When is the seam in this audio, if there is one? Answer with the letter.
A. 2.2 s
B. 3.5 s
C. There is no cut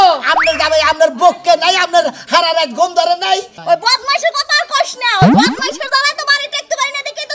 B